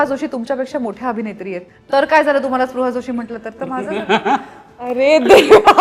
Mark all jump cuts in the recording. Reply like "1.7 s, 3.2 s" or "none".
none